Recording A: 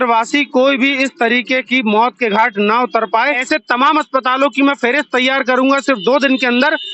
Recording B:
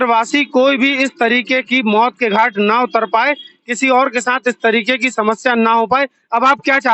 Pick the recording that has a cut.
A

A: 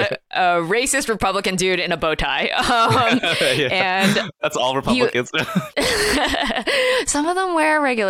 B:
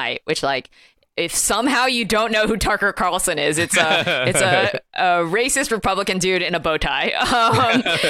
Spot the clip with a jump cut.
A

